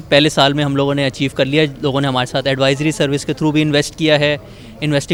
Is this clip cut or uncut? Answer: uncut